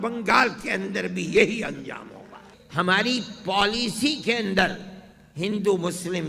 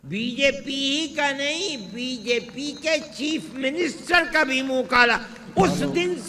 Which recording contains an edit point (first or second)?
first